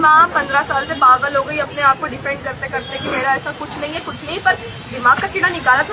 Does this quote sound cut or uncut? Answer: uncut